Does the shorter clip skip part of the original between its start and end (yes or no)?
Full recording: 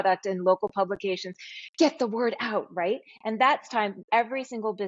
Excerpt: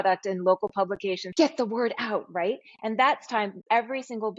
yes